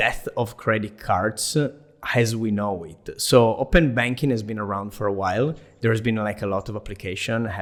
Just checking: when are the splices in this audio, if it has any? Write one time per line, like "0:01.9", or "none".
none